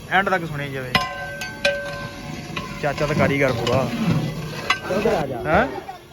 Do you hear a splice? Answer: yes; 1 cut; at 4.8 s

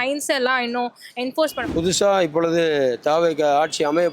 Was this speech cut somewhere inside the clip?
yes; 1 cut; at 1.6 s

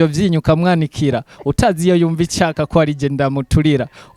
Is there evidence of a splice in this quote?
no; 0 cuts

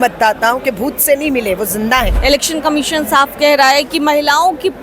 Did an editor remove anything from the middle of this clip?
yes; 1 cut; at 2.1 s

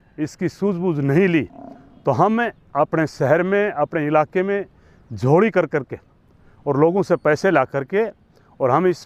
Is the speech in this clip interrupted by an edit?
no; 0 cuts

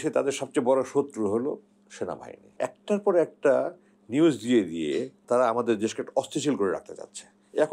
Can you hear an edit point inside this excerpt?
yes; 2 cuts; at 2.5 s, 5.1 s

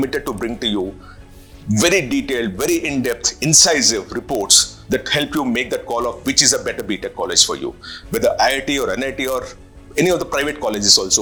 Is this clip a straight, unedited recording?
yes; 0 cuts

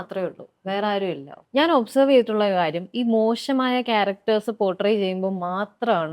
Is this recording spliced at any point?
yes; 1 cut; at 1.3 s

